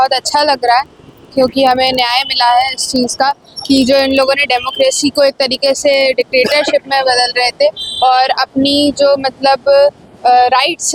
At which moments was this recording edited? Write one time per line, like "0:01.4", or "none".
none